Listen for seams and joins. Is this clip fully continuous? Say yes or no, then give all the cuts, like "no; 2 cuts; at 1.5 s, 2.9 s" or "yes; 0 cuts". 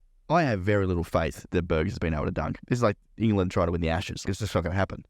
no; 3 cuts; at 1.5 s, 2.6 s, 4.2 s